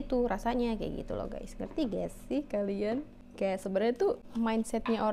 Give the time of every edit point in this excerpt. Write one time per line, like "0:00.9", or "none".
0:03.2
0:04.2